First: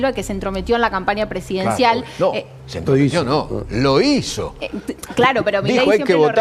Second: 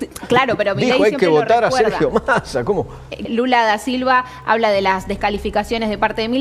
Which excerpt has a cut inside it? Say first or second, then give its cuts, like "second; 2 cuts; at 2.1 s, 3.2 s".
second; 1 cut; at 3.2 s